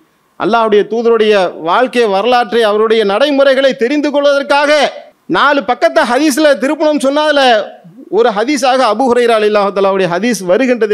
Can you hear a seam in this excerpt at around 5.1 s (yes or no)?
yes